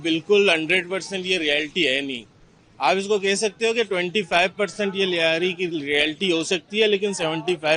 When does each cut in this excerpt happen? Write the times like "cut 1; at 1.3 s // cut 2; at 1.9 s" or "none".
none